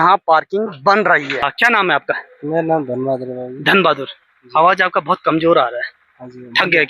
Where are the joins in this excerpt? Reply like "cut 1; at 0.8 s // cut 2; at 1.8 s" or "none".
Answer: cut 1; at 1.5 s